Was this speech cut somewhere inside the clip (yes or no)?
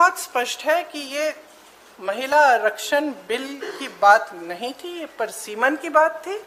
no